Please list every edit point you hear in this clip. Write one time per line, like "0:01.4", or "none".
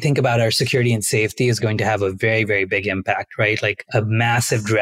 0:03.8

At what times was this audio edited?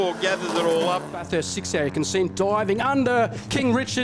0:01.2

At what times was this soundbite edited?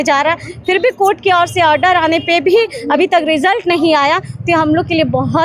none

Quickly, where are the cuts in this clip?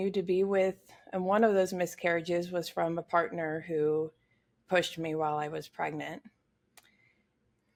none

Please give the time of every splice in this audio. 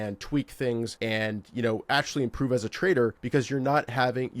0:00.9
0:03.2

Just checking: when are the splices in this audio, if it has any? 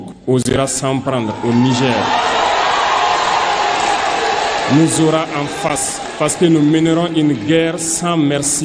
none

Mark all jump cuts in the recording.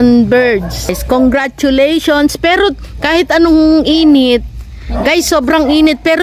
0:00.9

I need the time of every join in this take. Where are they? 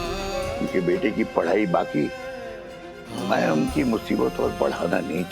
0:03.1

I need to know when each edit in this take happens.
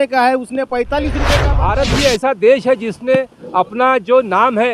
0:01.4

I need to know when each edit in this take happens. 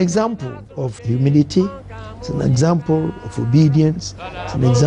0:01.0

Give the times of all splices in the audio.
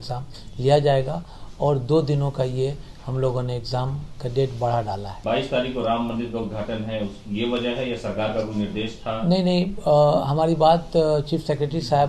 0:05.2

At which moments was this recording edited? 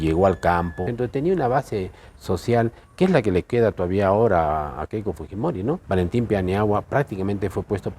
0:00.8
0:05.8

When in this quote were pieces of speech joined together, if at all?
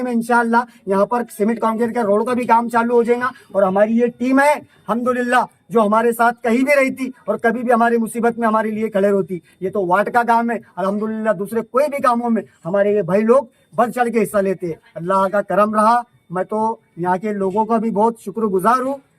none

